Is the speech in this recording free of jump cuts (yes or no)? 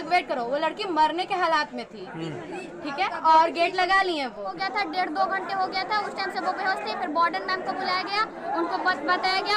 no